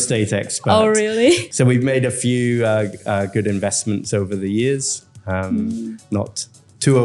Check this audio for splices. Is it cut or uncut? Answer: cut